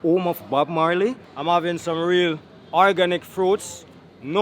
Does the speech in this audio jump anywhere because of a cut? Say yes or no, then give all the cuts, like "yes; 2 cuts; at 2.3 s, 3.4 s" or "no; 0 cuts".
yes; 1 cut; at 1.3 s